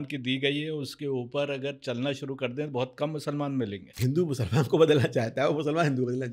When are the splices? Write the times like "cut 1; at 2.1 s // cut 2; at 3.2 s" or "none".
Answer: cut 1; at 4.0 s